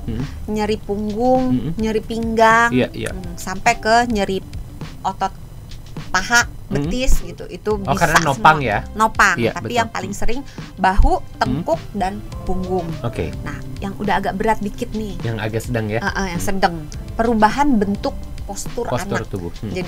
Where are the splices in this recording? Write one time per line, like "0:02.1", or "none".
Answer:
none